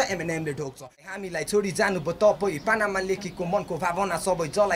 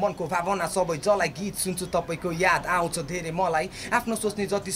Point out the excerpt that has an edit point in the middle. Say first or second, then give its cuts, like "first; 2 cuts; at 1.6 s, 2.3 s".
first; 1 cut; at 1.0 s